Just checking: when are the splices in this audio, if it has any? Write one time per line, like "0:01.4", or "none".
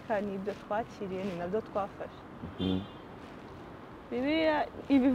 none